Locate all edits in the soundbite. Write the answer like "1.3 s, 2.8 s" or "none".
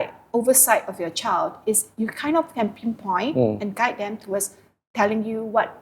none